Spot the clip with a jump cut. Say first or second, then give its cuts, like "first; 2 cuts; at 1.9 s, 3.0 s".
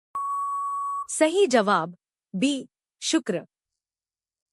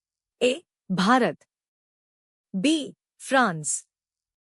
first; 1 cut; at 1.1 s